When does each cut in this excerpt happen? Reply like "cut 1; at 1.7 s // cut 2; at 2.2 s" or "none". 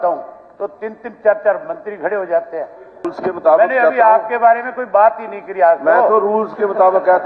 cut 1; at 3.0 s